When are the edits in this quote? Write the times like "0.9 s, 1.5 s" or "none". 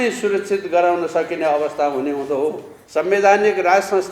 2.7 s